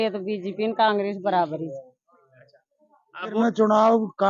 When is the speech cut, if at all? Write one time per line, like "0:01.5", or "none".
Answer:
0:03.4